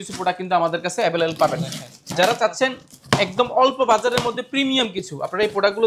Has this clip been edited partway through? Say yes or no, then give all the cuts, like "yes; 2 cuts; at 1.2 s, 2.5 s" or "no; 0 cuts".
no; 0 cuts